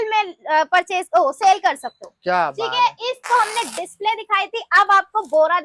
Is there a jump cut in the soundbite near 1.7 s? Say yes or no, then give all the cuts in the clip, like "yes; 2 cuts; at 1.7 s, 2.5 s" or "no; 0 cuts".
no; 1 cut; at 3.3 s